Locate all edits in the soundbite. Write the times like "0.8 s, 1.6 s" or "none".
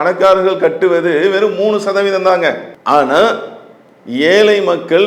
2.7 s